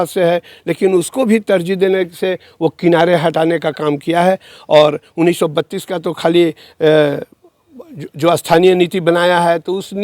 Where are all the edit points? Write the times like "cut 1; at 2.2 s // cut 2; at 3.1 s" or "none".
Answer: none